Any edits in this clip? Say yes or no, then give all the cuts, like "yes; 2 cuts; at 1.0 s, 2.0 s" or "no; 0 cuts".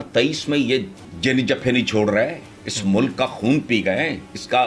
yes; 1 cut; at 1.0 s